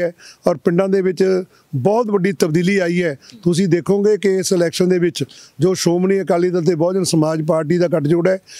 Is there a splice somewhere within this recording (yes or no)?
no